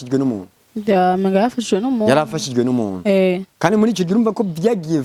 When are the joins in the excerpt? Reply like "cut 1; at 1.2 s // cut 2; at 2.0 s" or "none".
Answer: none